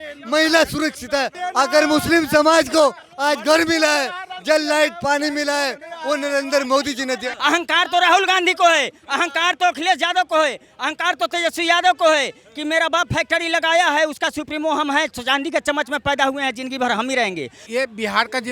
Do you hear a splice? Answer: yes; 3 cuts; at 1.4 s, 7.3 s, 17.6 s

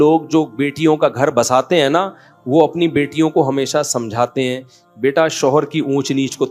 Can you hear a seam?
no; 0 cuts

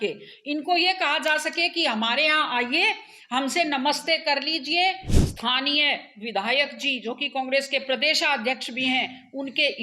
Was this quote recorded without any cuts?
no; 1 cut; at 5.1 s

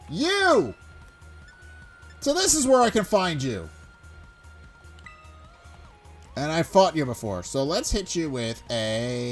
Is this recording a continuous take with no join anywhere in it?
yes; 0 cuts

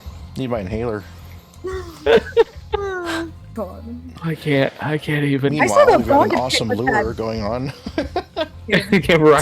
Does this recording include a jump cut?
yes; 1 cut; at 3.4 s

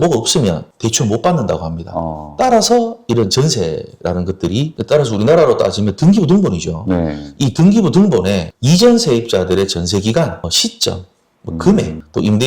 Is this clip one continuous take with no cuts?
no; 1 cut; at 4.7 s

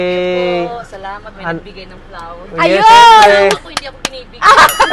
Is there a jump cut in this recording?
no; 0 cuts

